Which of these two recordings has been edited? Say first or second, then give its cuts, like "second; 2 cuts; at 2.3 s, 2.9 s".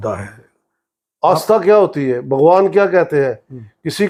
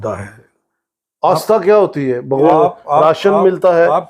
second; 1 cut; at 2.5 s